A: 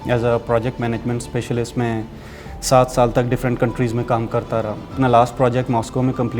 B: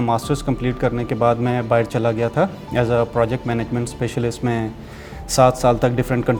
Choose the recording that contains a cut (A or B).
A